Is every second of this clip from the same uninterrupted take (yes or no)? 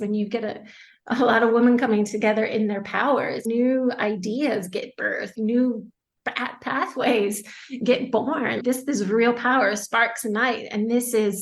no